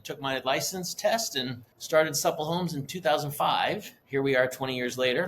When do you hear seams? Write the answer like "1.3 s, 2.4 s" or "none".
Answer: 1.7 s, 3.9 s